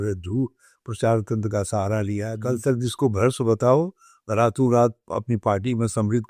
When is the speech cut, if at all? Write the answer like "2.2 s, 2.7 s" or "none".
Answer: 2.3 s

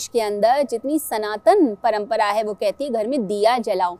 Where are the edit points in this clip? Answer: none

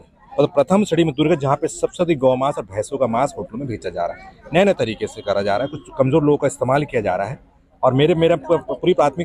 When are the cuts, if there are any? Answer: none

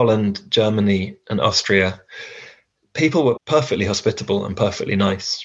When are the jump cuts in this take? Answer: 3.4 s

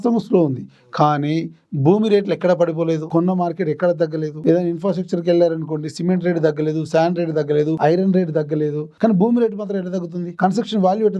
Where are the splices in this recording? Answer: 3.0 s, 4.3 s, 7.8 s, 8.8 s, 10.2 s

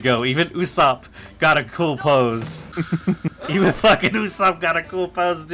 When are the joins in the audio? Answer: 2.6 s

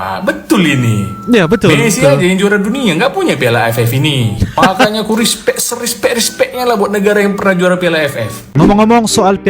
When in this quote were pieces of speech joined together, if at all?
8.4 s

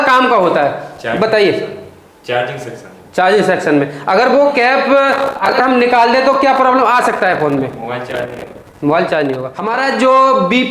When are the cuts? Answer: 9.5 s

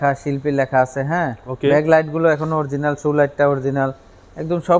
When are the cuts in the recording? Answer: none

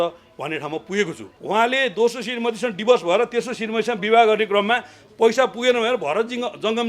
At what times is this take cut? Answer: 1.3 s

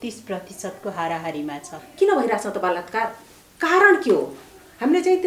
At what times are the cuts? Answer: 1.8 s

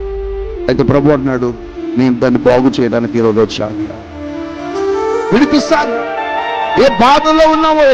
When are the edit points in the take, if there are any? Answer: none

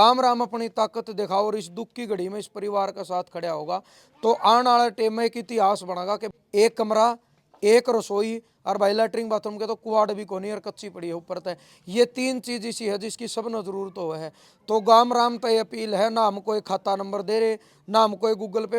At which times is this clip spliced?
6.2 s

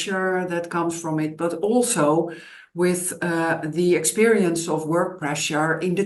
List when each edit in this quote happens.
none

